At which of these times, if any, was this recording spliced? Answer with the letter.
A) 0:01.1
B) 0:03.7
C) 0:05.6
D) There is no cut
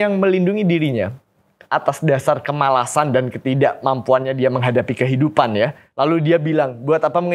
D